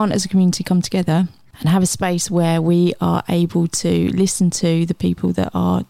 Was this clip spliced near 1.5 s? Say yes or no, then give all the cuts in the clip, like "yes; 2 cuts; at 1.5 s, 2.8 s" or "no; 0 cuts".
yes; 1 cut; at 1.5 s